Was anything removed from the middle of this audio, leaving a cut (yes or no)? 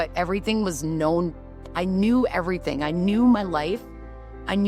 no